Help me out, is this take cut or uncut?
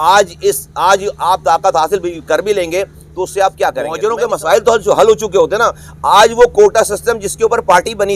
cut